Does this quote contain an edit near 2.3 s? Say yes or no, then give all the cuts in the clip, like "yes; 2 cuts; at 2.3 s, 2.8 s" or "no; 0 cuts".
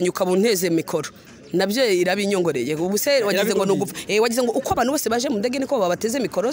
no; 0 cuts